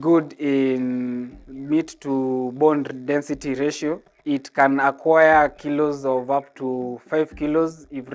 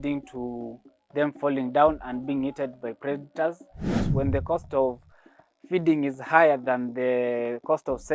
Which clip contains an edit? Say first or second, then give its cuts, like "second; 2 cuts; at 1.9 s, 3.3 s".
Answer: second; 1 cut; at 4.0 s